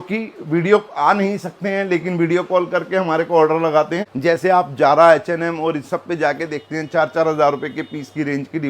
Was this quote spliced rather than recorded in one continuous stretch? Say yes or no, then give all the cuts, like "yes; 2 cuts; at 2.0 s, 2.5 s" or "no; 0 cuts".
yes; 1 cut; at 4.0 s